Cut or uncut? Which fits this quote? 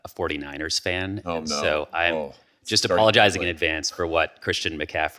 uncut